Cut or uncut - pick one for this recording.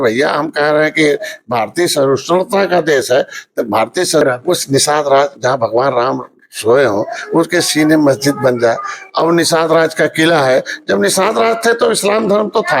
cut